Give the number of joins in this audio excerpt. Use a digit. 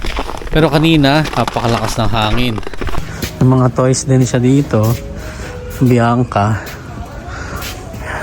1